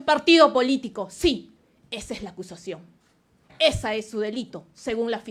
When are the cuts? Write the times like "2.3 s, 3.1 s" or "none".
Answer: none